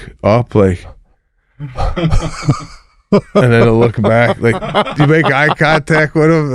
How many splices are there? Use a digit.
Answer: 0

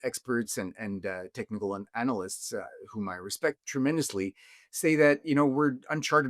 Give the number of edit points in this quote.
1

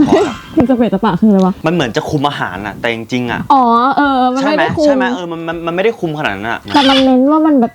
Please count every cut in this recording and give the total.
1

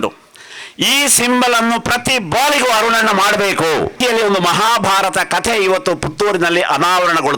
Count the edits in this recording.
1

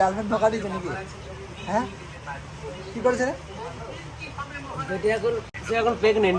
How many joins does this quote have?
0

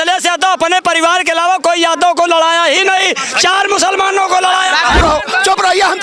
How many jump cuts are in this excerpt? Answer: 1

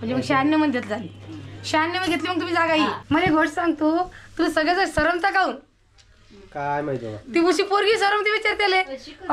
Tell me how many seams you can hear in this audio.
1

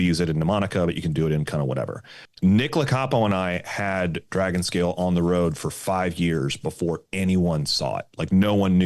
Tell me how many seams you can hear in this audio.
1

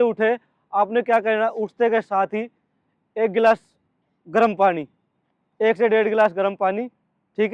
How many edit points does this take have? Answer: 0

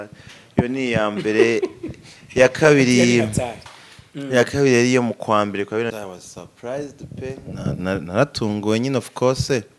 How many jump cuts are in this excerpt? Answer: 1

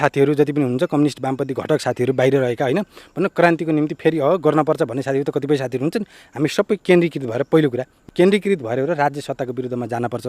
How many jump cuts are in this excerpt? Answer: 1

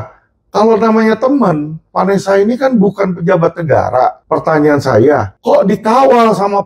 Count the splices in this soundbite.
2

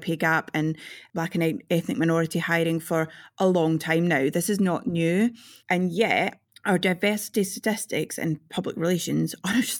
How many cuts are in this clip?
1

